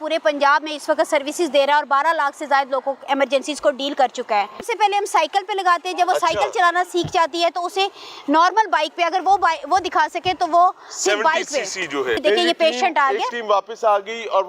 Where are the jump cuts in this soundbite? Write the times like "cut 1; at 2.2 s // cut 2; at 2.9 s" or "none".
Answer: cut 1; at 4.6 s // cut 2; at 12.2 s